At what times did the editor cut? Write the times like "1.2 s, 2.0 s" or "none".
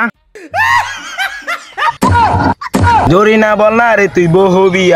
3.1 s